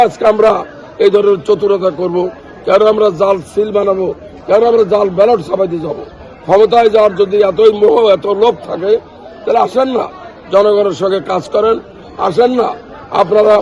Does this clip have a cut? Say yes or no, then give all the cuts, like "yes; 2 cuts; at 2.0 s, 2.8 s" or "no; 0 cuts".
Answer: no; 0 cuts